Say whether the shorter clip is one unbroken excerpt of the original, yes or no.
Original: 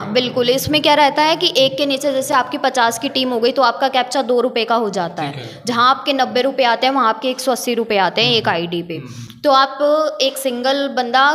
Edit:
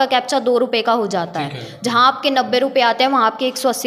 yes